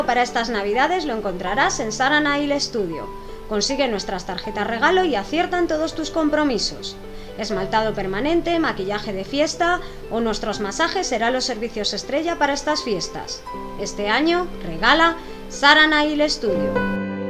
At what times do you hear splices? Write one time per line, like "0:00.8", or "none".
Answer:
none